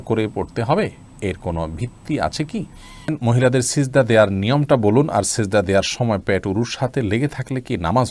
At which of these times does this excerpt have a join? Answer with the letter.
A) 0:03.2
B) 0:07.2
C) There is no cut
A